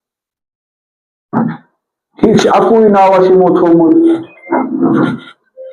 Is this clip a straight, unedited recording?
yes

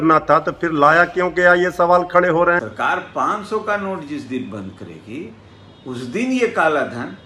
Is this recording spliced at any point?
yes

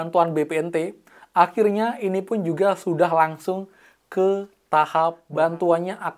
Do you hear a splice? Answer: yes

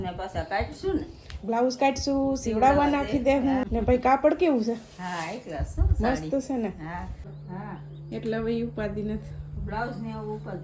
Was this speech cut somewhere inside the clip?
yes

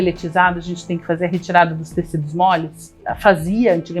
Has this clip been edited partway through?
yes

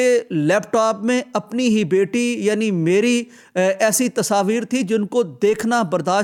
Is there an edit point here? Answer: no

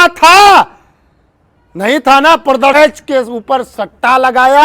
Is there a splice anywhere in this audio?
yes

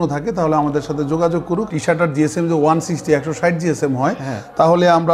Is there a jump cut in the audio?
yes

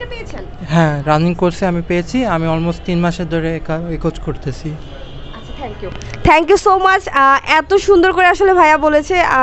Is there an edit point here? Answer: no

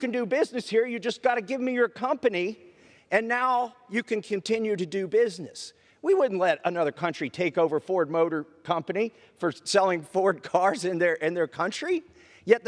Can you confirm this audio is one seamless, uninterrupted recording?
yes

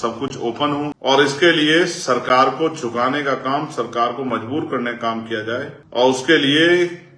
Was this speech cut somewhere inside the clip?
yes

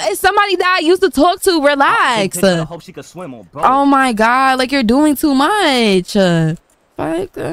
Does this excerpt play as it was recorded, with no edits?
yes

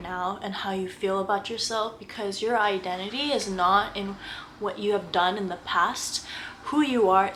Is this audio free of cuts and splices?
yes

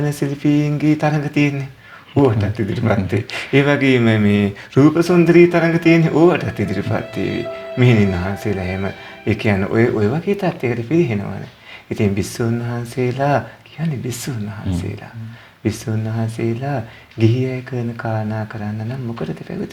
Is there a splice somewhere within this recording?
no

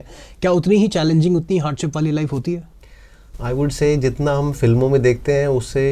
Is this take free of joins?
yes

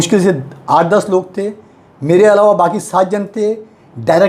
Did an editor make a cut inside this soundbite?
no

